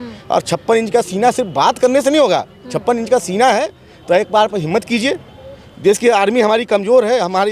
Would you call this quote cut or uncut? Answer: uncut